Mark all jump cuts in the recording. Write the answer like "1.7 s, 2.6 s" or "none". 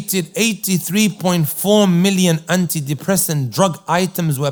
none